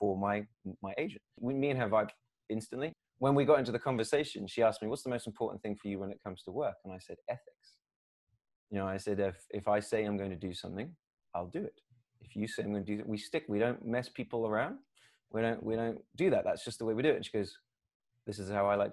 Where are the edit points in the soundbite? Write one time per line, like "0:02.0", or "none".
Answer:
0:01.4
0:03.0